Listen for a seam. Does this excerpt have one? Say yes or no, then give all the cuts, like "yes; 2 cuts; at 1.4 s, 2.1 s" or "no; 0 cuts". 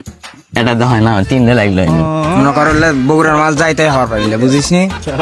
yes; 1 cut; at 2.1 s